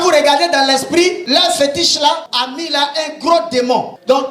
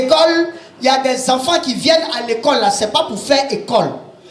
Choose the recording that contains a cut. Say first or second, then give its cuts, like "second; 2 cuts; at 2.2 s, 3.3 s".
first; 2 cuts; at 1.2 s, 2.3 s